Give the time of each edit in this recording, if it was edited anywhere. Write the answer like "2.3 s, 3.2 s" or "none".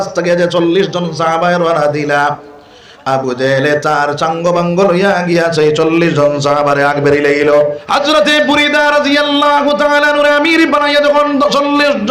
7.8 s